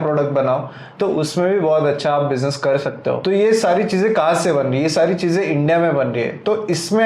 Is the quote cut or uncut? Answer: cut